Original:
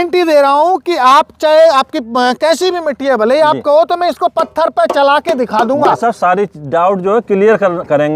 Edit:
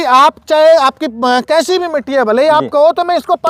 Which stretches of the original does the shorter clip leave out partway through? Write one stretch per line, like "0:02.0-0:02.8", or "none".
none